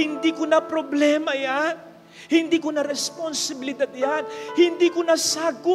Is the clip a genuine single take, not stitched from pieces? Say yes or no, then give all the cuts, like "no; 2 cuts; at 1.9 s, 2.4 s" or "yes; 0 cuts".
yes; 0 cuts